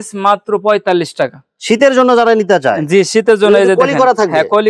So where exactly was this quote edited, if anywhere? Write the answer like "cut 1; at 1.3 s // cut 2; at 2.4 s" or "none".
none